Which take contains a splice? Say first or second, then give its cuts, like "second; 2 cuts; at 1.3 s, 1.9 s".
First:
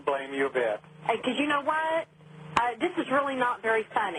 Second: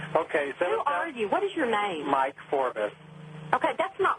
second; 1 cut; at 2.4 s